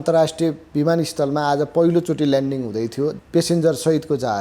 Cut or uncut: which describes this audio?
cut